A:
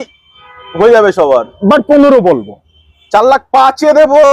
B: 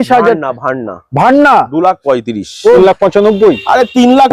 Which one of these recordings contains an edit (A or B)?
B